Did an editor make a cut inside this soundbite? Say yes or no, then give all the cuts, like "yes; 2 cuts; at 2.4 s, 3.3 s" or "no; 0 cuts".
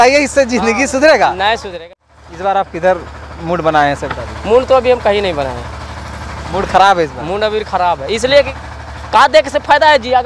yes; 2 cuts; at 1.7 s, 8.6 s